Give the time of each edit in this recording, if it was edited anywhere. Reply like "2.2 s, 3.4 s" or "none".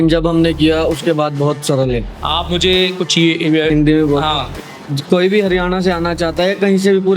3.7 s